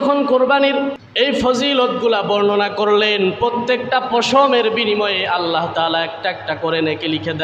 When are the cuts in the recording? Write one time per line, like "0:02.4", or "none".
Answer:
0:01.0